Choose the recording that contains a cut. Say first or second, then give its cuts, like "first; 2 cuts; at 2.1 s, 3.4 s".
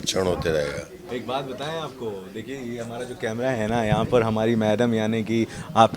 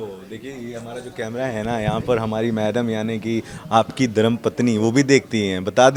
first; 1 cut; at 1.1 s